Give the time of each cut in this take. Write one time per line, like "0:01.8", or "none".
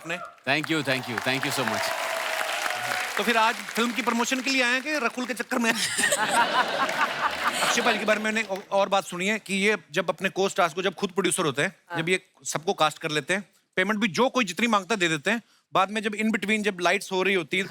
0:07.5